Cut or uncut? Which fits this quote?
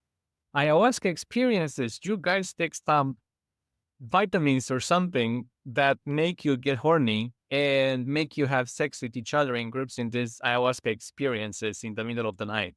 cut